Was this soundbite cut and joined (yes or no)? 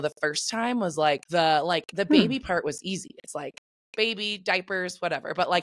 yes